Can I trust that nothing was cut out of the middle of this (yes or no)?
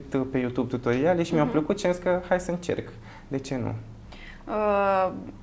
yes